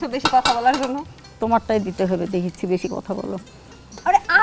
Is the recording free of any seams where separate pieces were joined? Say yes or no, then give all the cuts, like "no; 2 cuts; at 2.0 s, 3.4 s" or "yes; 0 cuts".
yes; 0 cuts